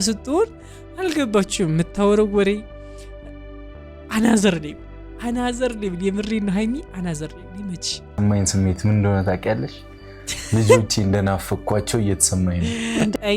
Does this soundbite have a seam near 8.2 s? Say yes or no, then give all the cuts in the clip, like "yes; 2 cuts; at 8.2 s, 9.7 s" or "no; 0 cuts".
yes; 1 cut; at 8.2 s